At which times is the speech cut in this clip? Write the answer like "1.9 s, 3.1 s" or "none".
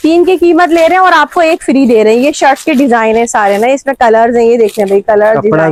none